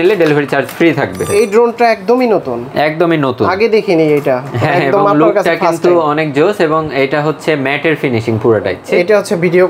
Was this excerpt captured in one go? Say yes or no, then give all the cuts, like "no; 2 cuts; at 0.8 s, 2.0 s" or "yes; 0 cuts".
no; 2 cuts; at 1.2 s, 8.8 s